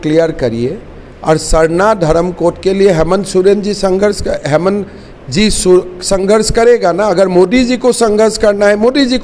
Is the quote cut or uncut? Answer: uncut